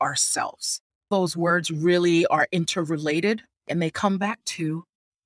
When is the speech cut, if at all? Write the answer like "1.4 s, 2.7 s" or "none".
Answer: 1.1 s